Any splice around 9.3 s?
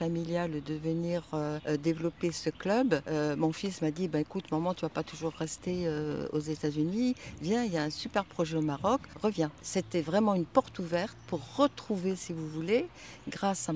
yes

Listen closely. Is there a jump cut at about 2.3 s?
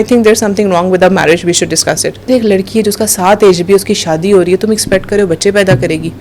yes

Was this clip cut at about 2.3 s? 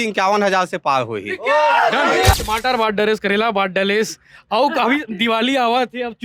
yes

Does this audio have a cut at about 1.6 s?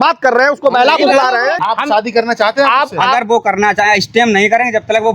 yes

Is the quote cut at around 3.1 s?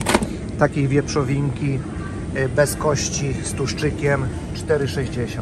no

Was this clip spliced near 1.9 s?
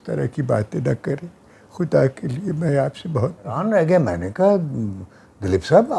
no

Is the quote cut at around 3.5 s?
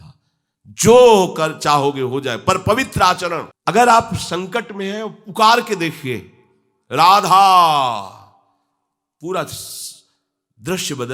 yes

